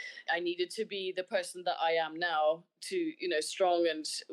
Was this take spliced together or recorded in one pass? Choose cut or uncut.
uncut